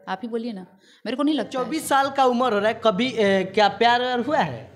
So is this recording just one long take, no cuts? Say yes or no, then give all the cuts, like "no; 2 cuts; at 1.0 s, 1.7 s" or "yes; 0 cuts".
no; 1 cut; at 1.7 s